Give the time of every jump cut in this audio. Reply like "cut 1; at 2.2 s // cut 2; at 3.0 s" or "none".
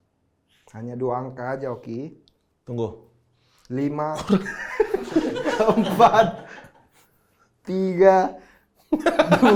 none